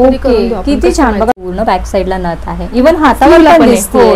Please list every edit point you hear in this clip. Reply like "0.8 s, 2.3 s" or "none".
1.4 s